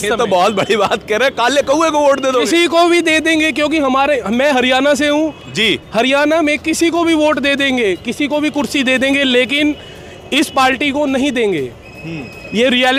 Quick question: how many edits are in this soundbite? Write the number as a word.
zero